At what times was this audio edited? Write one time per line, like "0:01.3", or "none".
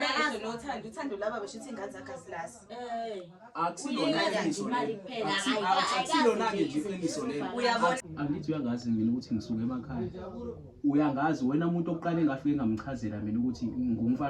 0:08.0